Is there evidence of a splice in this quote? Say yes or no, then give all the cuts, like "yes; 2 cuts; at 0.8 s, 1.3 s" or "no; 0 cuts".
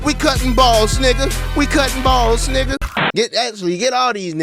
yes; 1 cut; at 2.8 s